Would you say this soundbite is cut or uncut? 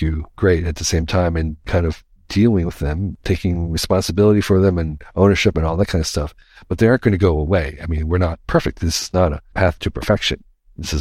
cut